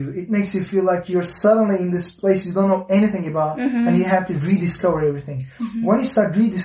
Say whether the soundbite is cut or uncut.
uncut